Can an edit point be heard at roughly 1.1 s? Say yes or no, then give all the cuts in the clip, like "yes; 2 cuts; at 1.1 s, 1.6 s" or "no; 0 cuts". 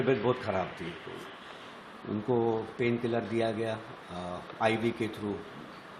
yes; 1 cut; at 1.1 s